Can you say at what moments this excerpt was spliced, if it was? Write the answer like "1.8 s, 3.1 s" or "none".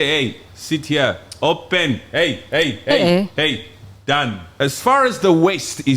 4.5 s